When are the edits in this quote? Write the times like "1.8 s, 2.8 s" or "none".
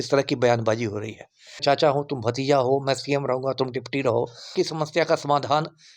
1.6 s, 4.6 s